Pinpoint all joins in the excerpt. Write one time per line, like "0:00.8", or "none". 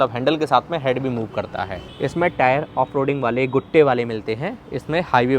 0:01.8

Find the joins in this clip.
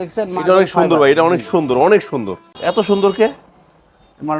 0:02.6

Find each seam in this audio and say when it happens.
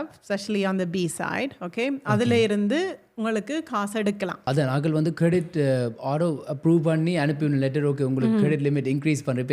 0:04.4

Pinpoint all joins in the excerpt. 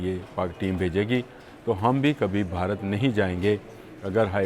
none

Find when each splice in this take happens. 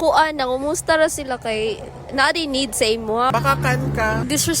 0:03.3

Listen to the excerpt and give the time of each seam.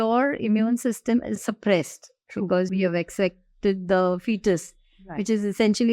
0:01.4
0:02.7

